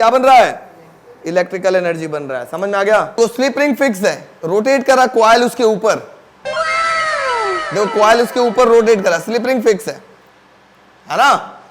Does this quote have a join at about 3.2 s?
yes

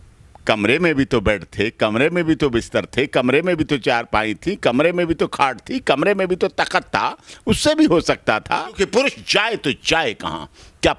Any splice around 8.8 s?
yes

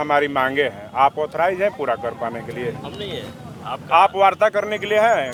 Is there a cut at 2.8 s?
no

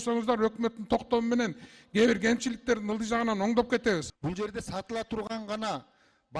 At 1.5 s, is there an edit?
no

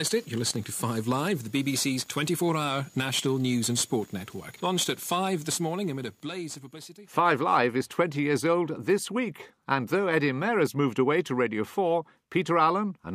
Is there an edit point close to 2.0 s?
no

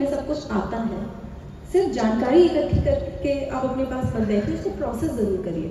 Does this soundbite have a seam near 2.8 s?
no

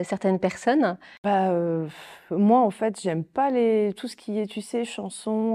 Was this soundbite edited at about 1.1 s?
yes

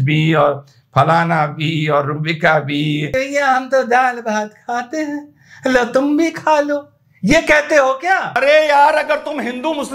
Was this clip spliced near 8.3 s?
yes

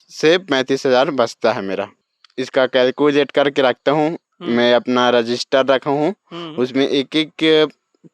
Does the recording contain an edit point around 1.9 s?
yes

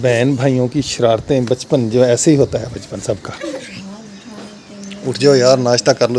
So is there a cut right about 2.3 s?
no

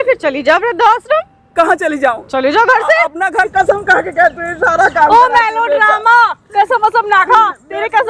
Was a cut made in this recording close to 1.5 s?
no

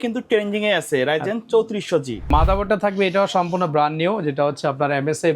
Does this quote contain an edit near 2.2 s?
yes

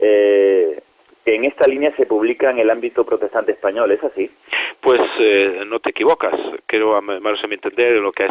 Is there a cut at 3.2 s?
no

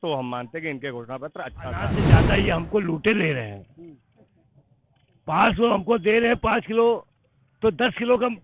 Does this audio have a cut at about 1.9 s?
yes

